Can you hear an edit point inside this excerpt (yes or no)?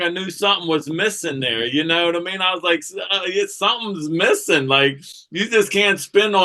no